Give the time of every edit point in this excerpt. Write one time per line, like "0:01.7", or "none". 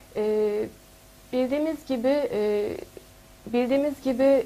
0:02.0